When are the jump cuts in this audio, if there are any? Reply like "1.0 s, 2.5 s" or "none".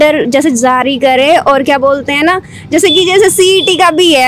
none